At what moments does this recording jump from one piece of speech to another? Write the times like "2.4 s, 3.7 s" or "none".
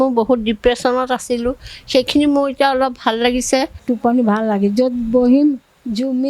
3.8 s